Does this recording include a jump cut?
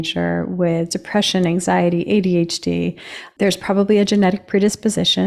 yes; 1 cut; at 3.2 s

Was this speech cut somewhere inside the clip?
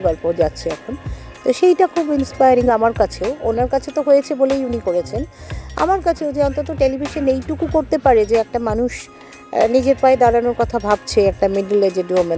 no; 0 cuts

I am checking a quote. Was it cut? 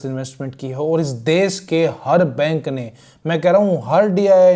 no; 0 cuts

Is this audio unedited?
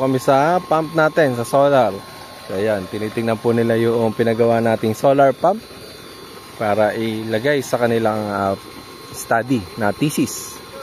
yes; 0 cuts

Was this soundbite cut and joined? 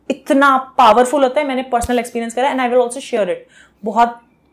no; 0 cuts

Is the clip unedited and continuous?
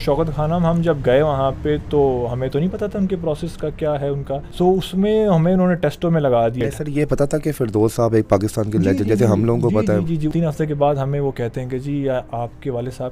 no; 3 cuts; at 4.5 s, 6.6 s, 10.3 s

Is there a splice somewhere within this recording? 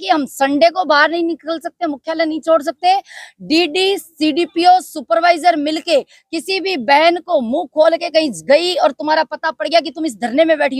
no; 0 cuts

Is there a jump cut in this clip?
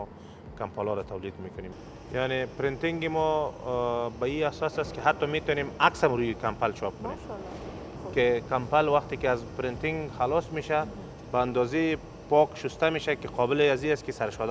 yes; 2 cuts; at 1.6 s, 7.9 s

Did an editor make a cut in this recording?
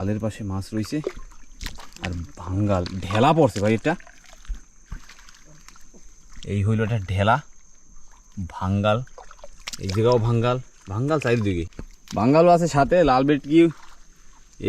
yes; 1 cut; at 11.7 s

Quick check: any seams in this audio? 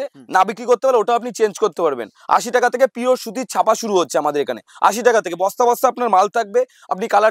no; 0 cuts

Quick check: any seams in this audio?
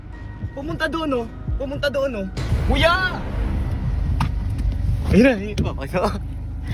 yes; 1 cut; at 2.5 s

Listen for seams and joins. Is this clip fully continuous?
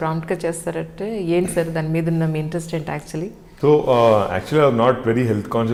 yes; 0 cuts

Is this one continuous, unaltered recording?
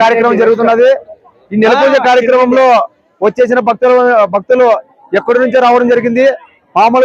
yes; 0 cuts

